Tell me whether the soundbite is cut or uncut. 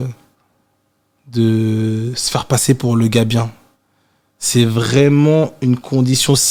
uncut